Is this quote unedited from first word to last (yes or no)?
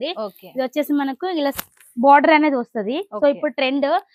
yes